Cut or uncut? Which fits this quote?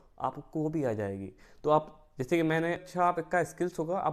cut